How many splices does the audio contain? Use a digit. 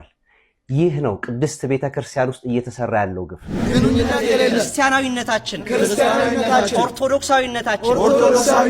1